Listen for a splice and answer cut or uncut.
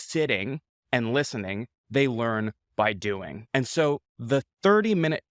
cut